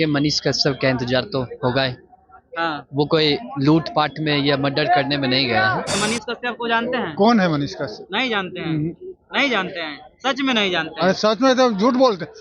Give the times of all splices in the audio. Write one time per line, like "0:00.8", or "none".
0:05.9